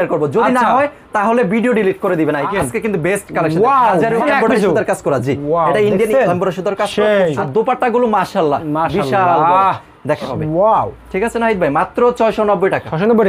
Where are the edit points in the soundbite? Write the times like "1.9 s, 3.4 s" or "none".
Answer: 2.5 s, 4.2 s, 7.4 s, 10.3 s